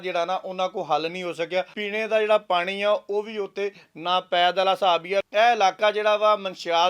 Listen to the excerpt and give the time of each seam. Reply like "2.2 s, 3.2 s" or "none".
1.8 s, 5.3 s